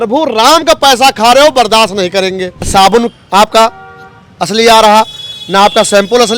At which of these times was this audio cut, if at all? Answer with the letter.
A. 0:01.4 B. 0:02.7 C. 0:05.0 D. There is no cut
B